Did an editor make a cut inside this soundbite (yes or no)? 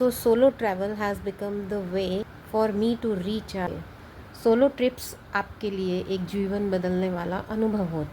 yes